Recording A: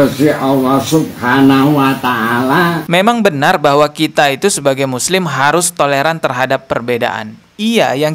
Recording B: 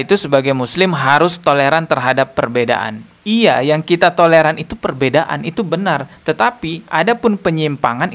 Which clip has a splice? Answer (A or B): A